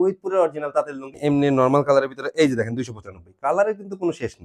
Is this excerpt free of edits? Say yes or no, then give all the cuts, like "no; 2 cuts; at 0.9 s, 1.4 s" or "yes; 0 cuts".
no; 1 cut; at 1.2 s